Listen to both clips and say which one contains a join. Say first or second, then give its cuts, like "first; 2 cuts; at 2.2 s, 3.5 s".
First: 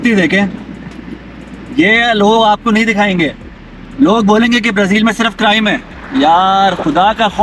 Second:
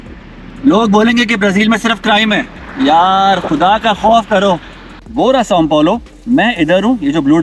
second; 1 cut; at 5.0 s